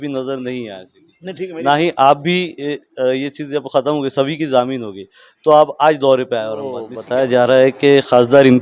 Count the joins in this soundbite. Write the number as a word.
one